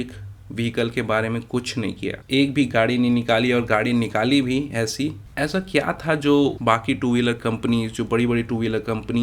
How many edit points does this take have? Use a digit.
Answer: 2